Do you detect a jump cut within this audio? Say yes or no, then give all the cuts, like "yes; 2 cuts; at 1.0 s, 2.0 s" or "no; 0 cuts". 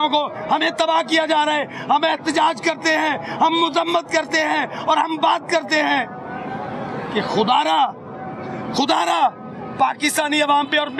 no; 0 cuts